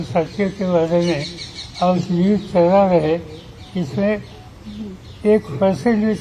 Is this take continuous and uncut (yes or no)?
yes